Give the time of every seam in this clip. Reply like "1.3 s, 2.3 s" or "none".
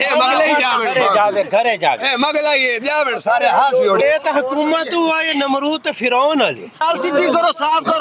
4.0 s, 6.8 s